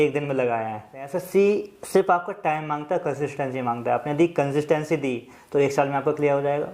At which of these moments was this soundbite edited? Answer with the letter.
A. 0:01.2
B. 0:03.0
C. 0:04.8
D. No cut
A